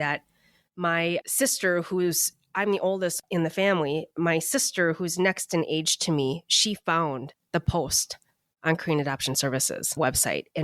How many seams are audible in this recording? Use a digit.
1